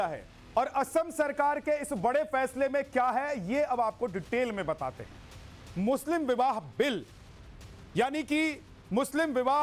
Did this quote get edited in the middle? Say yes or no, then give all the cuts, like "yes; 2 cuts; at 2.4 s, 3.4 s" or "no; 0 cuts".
no; 0 cuts